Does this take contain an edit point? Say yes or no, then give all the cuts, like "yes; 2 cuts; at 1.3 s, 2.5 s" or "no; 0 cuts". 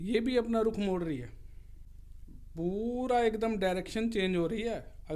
no; 0 cuts